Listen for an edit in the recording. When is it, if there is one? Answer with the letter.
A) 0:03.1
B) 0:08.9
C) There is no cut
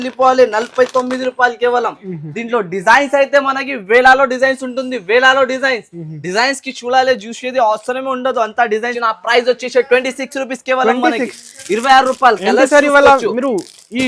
B